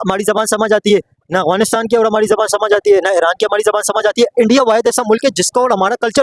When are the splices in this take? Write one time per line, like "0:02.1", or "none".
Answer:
none